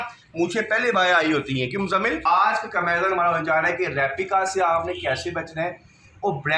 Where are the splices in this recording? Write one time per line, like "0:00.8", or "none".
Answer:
0:02.2